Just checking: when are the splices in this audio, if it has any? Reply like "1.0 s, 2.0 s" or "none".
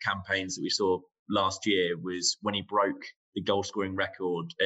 none